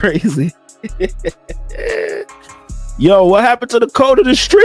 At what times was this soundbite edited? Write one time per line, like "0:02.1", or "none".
none

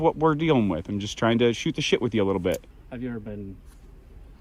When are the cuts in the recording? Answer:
0:02.8

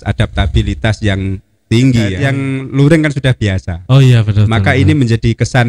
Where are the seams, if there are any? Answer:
0:02.2

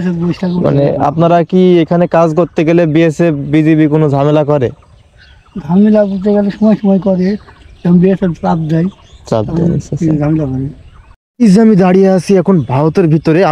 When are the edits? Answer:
0:11.1

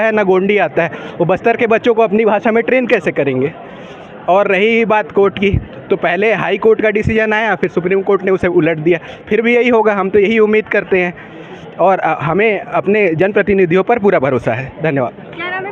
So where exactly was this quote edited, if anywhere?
none

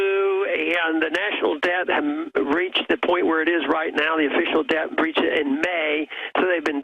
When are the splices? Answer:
0:02.5

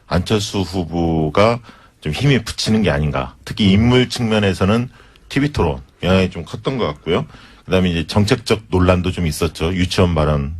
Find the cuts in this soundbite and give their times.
0:03.1

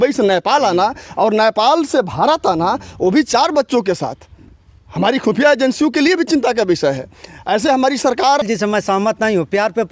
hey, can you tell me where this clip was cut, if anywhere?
0:08.4

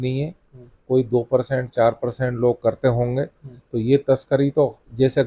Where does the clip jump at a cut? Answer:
none

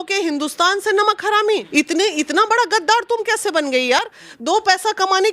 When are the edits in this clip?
0:01.7

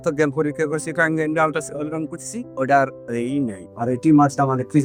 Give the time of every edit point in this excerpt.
none

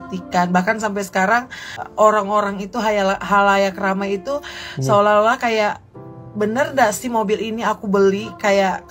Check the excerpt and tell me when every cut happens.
0:01.8

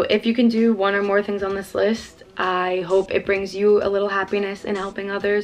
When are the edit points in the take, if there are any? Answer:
none

